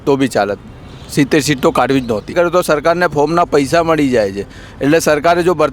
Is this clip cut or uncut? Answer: cut